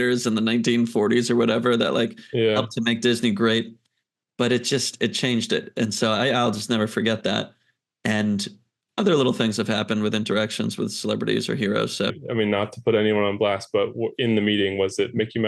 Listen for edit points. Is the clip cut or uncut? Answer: cut